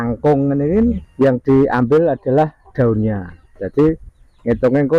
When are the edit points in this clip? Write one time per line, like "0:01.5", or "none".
0:01.0